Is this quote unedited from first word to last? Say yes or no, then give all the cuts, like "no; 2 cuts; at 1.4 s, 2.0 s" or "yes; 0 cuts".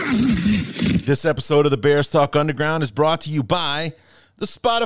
no; 1 cut; at 1.0 s